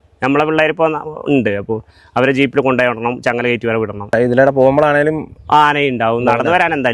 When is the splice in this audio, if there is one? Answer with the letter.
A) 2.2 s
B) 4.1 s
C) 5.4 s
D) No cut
B